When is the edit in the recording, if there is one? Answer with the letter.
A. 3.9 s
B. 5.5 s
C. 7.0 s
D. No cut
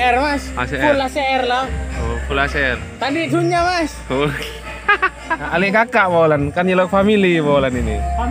B